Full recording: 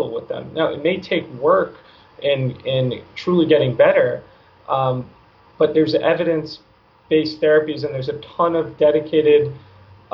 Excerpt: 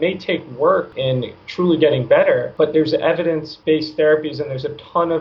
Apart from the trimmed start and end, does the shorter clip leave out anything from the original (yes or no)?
yes